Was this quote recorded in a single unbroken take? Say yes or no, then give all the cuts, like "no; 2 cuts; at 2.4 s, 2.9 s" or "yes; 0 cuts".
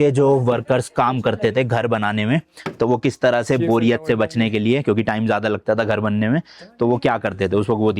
yes; 0 cuts